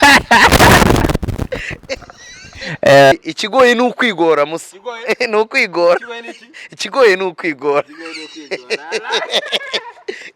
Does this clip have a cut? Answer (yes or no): yes